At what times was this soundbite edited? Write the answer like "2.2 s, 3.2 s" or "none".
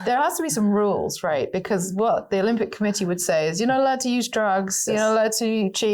none